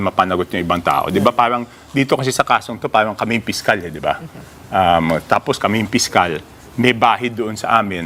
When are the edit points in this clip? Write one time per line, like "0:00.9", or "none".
none